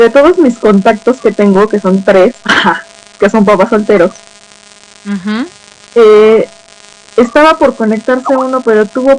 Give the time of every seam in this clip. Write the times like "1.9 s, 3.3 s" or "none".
2.2 s